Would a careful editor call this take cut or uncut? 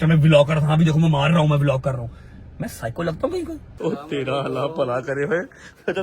cut